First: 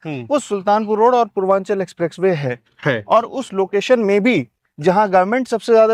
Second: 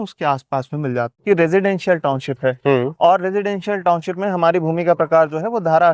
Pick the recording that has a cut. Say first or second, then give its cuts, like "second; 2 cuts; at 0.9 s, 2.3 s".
second; 1 cut; at 1.2 s